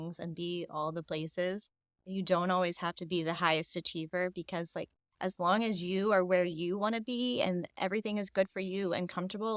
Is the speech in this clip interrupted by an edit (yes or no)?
no